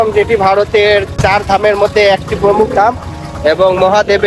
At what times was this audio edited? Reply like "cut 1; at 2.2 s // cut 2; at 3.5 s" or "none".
cut 1; at 1.2 s